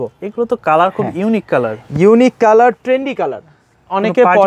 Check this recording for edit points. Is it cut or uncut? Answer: uncut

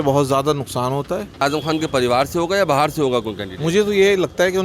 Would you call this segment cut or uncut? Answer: cut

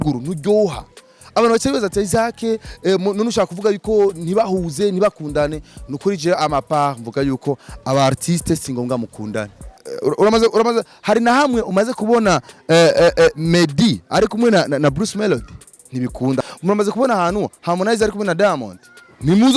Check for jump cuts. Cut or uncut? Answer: cut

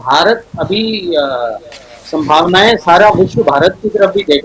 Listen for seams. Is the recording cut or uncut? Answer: uncut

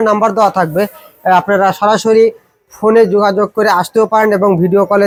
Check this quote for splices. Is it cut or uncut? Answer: uncut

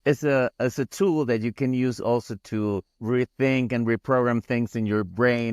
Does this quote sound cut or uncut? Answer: cut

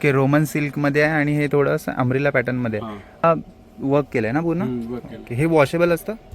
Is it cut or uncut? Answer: cut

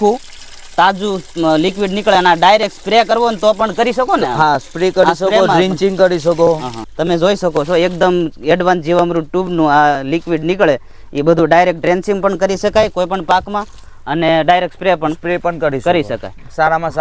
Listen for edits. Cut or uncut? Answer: cut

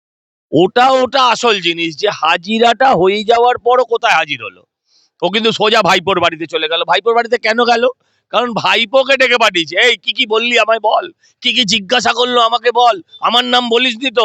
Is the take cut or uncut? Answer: uncut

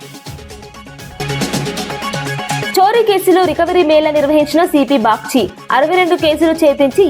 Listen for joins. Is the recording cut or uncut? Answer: cut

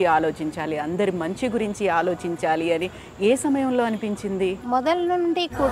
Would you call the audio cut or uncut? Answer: cut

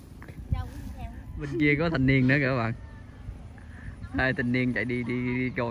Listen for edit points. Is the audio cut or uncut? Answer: cut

